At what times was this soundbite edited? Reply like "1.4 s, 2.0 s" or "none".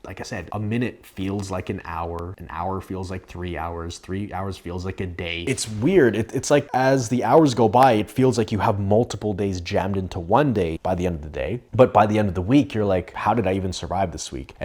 2.4 s, 5.4 s, 6.7 s, 10.8 s